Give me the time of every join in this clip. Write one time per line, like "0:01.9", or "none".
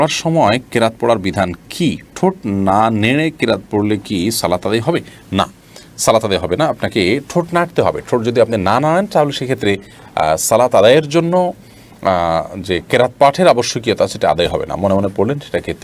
none